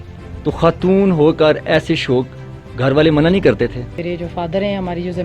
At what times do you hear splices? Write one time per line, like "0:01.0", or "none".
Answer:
0:04.0